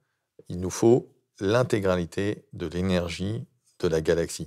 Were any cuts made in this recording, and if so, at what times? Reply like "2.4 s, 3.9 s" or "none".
none